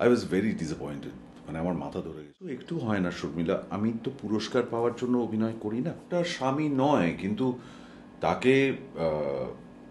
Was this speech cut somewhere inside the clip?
yes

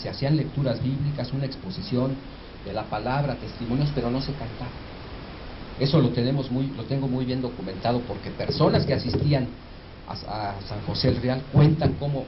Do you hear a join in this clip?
no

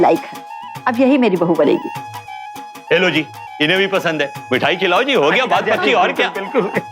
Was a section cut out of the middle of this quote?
no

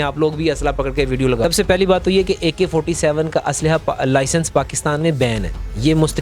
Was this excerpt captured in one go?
no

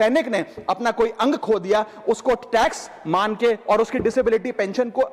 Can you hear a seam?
no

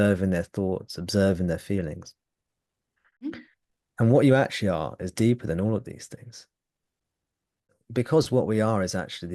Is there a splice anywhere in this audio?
yes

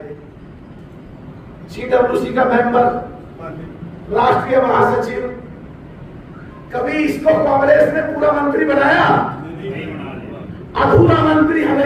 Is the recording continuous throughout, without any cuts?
yes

